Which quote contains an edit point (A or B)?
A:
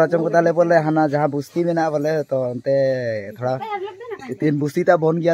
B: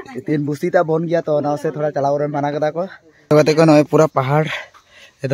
B